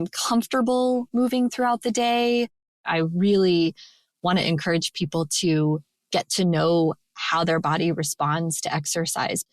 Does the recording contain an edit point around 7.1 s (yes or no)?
no